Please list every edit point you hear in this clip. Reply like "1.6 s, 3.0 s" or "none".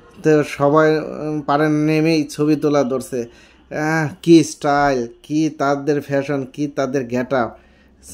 none